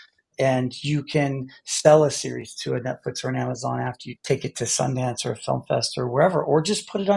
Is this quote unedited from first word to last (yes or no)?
no